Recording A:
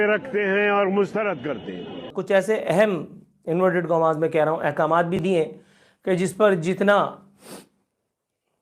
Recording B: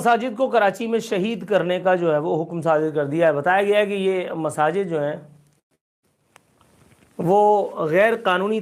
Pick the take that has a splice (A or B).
A